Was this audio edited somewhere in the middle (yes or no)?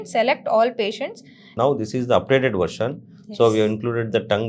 yes